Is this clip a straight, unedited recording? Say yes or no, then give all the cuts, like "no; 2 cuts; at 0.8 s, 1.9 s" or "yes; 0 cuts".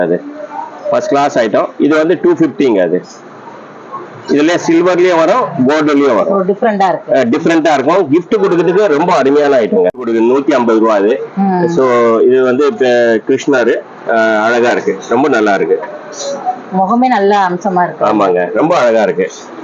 yes; 0 cuts